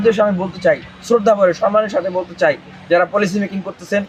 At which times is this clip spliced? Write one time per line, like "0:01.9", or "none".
none